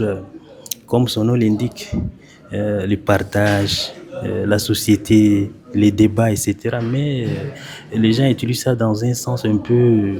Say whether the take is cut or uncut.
uncut